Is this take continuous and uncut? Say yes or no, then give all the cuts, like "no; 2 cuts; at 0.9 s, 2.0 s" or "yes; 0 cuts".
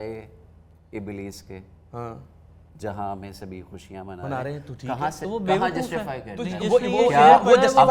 yes; 0 cuts